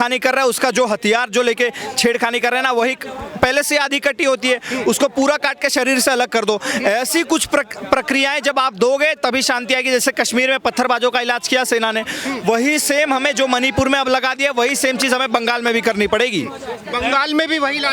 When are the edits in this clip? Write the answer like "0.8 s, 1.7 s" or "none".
none